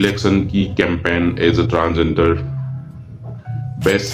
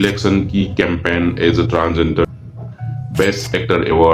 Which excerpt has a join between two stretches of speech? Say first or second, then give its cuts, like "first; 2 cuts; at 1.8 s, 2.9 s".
second; 1 cut; at 2.2 s